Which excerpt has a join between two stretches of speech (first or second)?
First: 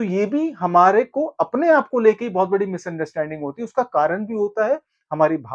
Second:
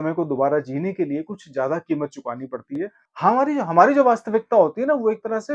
second